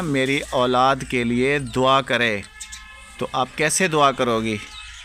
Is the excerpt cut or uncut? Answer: uncut